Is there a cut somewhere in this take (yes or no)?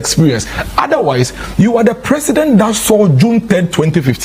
no